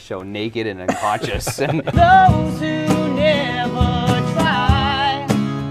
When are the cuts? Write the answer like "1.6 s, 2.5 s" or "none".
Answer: 1.9 s